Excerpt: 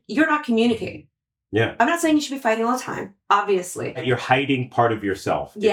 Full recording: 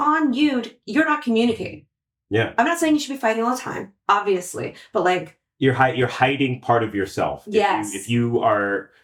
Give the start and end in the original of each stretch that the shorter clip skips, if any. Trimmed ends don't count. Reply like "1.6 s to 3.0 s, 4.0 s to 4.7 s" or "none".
4.8 s to 5.9 s